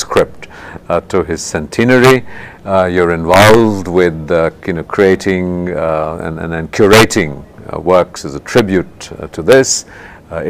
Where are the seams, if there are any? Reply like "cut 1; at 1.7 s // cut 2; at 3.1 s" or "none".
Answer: cut 1; at 5.3 s